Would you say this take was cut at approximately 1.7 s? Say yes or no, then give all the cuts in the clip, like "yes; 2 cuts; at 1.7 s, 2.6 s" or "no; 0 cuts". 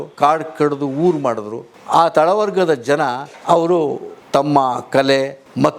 yes; 1 cut; at 1.7 s